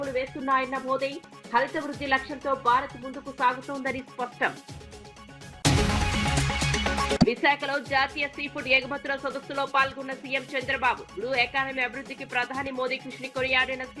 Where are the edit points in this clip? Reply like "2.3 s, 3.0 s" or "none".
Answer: none